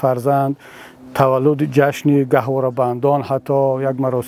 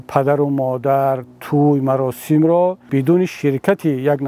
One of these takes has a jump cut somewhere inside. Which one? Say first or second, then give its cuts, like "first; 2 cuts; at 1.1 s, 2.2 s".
second; 1 cut; at 2.8 s